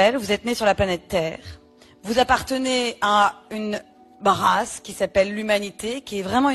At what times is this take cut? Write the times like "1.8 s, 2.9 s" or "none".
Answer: none